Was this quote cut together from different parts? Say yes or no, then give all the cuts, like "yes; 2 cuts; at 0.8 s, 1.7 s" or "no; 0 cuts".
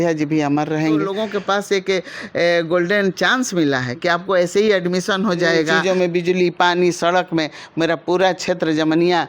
yes; 2 cuts; at 1.2 s, 5.7 s